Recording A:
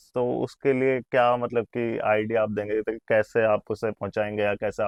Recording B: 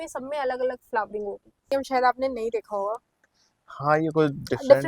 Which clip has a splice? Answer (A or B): B